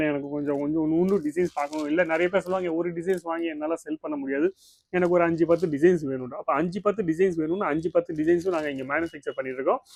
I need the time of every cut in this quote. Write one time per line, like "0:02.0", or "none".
none

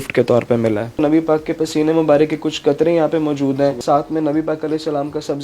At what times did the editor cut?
0:00.9
0:03.8

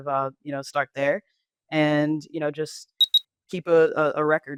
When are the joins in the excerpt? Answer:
none

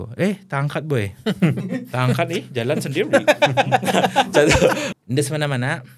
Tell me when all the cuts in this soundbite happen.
0:04.9

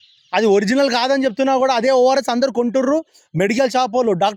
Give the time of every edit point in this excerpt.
none

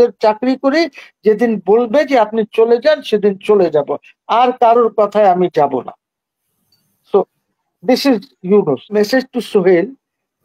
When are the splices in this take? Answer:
0:08.9

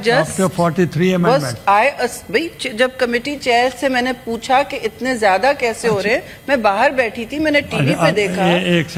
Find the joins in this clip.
none

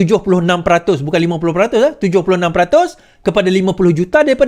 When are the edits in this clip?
none

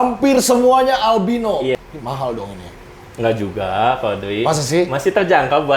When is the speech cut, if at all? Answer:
0:01.9

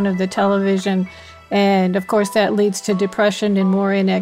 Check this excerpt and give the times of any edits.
none

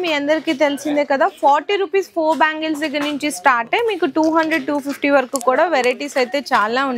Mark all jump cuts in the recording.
none

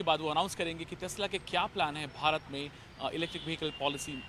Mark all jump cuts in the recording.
0:01.7

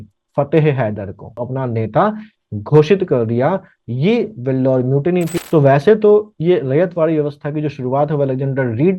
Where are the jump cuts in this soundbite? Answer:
0:01.4
0:05.3

